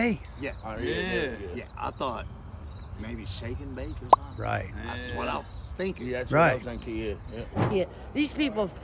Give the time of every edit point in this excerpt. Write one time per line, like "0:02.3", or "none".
0:01.7
0:07.7